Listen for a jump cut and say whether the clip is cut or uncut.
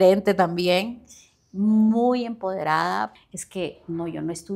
cut